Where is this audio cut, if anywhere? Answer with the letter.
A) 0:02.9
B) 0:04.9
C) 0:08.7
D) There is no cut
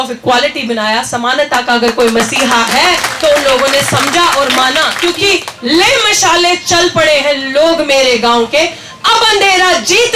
B